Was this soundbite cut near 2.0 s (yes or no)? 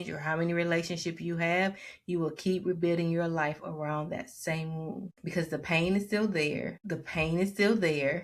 no